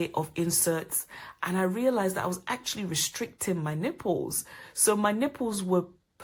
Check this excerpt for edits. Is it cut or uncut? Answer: uncut